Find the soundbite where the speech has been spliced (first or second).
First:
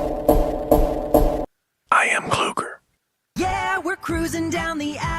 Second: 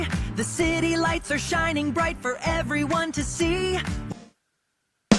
first